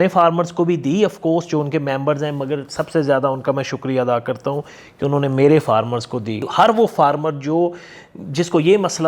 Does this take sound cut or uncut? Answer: cut